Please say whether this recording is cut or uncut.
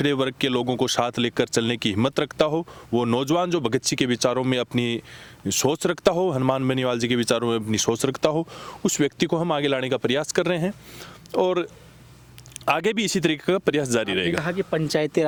uncut